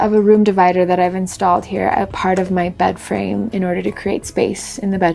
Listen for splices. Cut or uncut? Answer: uncut